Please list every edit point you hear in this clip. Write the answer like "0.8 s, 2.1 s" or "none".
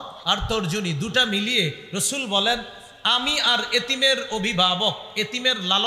none

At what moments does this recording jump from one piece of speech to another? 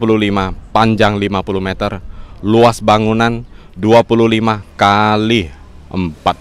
none

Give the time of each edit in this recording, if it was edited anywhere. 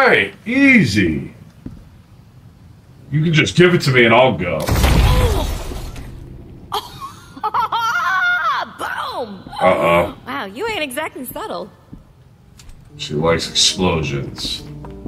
none

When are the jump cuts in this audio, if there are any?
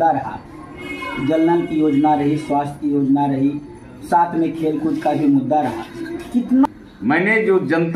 6.7 s

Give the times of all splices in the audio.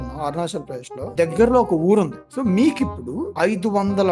1.0 s, 2.2 s, 3.2 s

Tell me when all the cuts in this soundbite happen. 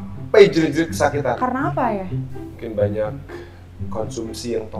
2.2 s

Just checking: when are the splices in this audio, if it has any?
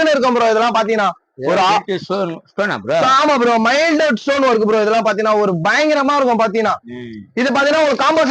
none

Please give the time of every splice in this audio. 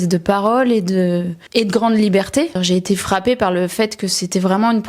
1.4 s, 2.6 s

